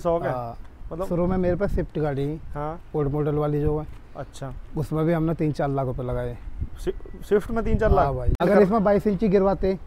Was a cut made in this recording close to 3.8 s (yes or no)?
no